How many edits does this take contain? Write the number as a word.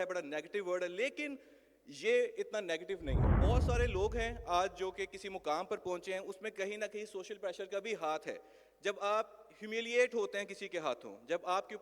one